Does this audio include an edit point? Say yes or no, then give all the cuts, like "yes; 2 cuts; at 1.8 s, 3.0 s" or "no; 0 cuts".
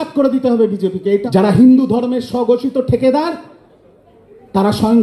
yes; 1 cut; at 1.2 s